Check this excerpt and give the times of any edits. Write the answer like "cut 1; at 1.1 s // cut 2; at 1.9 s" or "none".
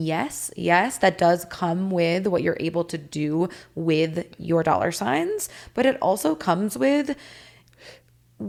none